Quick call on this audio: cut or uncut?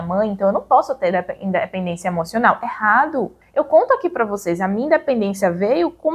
cut